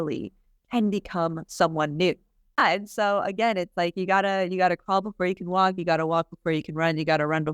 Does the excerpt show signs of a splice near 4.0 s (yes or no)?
no